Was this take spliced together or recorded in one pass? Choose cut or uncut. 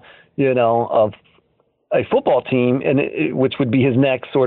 uncut